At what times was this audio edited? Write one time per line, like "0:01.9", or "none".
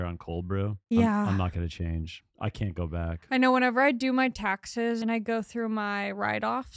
0:00.8
0:05.0